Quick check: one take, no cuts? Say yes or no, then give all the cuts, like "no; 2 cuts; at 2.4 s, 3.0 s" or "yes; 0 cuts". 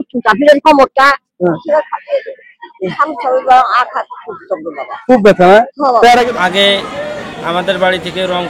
no; 1 cut; at 6.2 s